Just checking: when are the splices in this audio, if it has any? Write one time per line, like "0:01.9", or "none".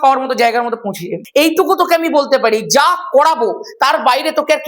0:01.0